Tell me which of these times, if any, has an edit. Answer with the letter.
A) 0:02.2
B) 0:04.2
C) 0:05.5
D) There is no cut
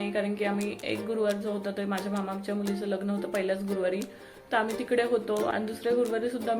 C